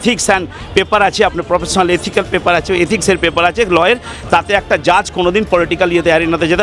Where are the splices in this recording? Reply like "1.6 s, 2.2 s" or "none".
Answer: none